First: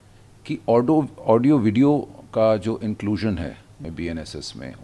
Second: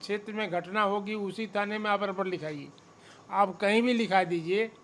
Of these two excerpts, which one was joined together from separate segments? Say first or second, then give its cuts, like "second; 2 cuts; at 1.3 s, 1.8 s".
first; 1 cut; at 3.8 s